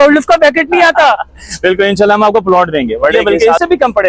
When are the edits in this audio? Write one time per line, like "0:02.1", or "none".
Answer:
0:03.2